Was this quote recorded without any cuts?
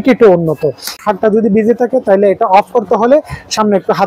no; 1 cut; at 0.9 s

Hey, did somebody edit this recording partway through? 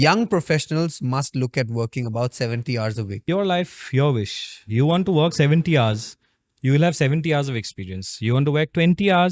yes; 1 cut; at 3.2 s

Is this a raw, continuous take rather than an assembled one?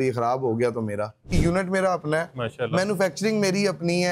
no; 1 cut; at 1.2 s

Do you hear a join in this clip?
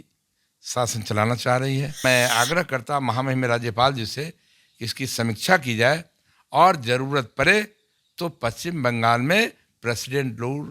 yes; 1 cut; at 2.0 s

